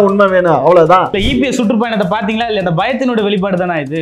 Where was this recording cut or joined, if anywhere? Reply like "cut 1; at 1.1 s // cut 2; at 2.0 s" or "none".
cut 1; at 1.2 s